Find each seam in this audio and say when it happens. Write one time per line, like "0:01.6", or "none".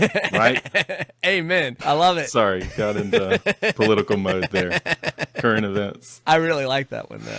0:01.7
0:06.1